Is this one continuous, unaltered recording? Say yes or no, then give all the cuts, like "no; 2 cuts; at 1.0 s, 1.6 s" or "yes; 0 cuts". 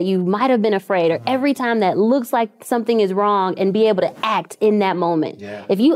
yes; 0 cuts